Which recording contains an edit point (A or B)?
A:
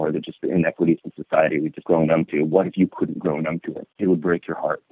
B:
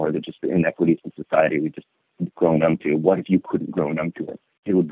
A